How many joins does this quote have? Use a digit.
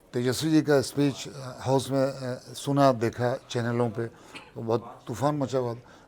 0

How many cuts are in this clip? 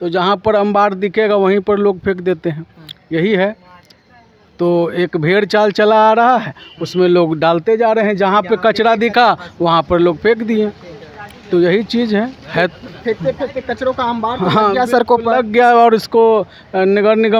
0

